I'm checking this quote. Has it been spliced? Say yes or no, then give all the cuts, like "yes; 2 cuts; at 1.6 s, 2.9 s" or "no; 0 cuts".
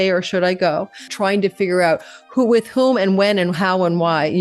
yes; 1 cut; at 1.1 s